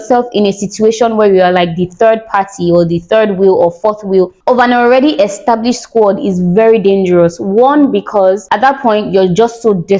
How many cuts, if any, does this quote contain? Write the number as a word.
zero